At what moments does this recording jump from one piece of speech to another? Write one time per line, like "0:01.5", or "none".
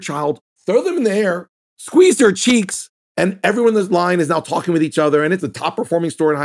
0:03.0
0:05.4